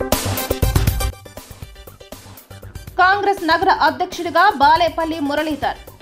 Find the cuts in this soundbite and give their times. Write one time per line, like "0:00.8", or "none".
none

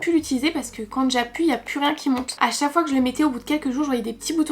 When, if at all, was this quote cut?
0:02.3

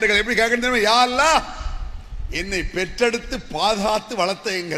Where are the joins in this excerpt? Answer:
none

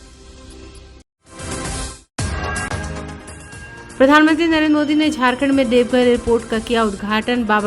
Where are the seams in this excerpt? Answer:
none

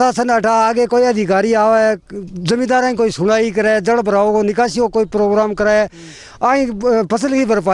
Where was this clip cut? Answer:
none

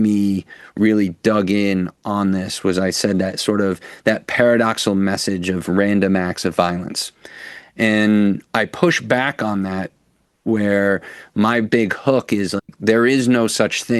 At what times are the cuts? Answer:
none

